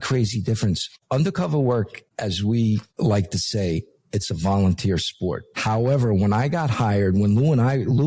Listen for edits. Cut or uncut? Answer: cut